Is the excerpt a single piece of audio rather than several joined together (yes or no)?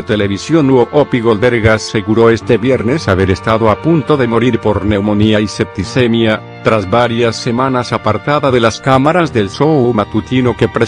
yes